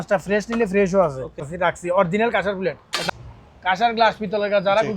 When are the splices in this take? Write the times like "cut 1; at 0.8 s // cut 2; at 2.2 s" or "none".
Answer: cut 1; at 1.5 s // cut 2; at 3.0 s